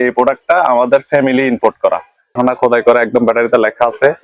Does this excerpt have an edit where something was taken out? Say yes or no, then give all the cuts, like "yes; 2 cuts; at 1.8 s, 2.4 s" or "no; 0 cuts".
yes; 1 cut; at 2.3 s